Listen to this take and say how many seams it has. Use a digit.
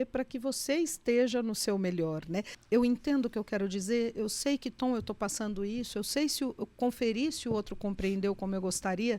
1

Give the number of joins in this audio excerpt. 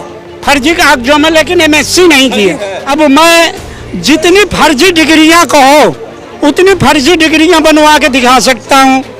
1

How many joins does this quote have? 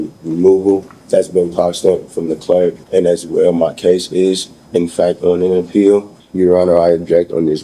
3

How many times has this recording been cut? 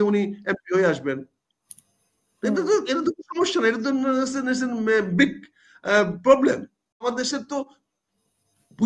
1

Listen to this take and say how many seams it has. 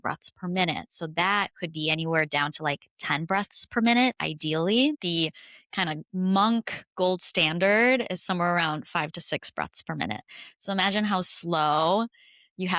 1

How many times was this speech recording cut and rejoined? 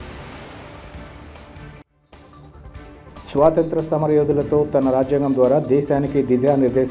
0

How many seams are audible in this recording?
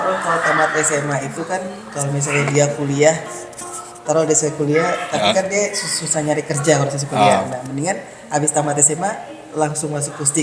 0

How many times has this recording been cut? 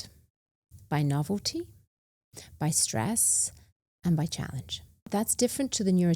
1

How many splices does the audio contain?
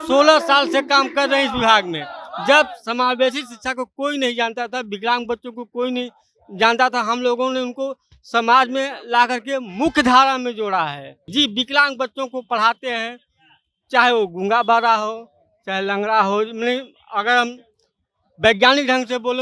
1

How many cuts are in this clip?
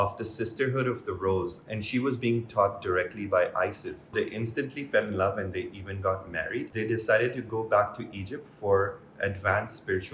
2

